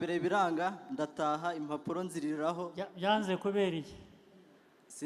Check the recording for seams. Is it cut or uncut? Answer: uncut